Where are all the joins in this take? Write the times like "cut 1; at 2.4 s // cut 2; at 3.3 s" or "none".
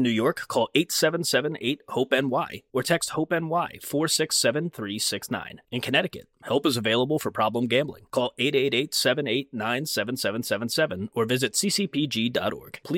none